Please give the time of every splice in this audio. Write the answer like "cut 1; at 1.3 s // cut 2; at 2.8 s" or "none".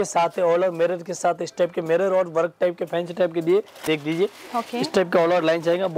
cut 1; at 3.8 s